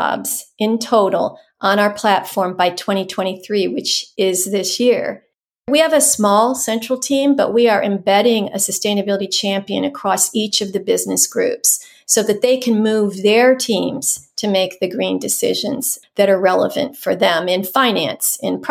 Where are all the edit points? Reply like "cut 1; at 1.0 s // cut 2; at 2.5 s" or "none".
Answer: cut 1; at 4.0 s // cut 2; at 5.7 s